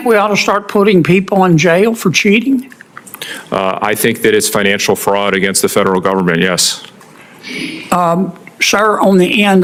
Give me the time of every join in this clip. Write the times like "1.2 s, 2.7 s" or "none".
none